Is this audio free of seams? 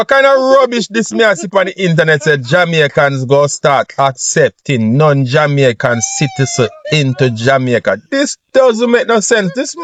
yes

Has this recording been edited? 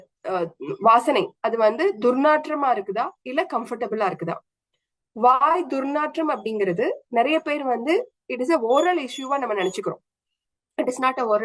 no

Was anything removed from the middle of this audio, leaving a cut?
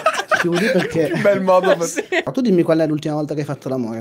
yes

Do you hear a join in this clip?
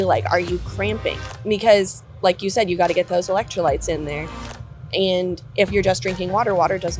no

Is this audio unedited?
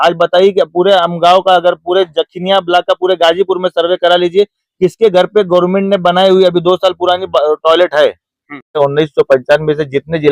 no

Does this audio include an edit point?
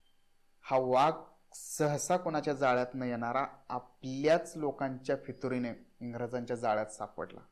no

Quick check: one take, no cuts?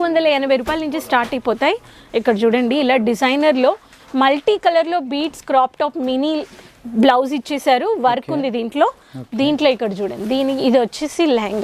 yes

